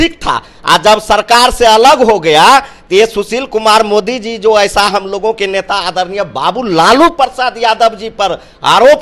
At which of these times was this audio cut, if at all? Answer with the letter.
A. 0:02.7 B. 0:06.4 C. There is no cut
C